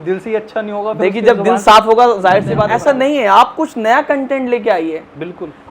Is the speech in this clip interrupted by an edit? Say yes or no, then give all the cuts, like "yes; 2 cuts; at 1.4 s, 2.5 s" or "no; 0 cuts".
yes; 1 cut; at 2.6 s